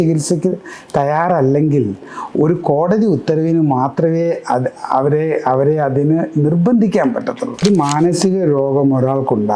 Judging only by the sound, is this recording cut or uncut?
cut